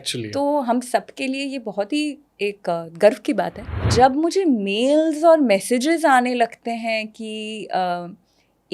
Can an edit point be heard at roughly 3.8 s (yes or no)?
yes